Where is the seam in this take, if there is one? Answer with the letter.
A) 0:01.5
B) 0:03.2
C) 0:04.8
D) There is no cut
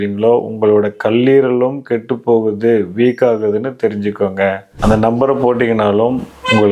C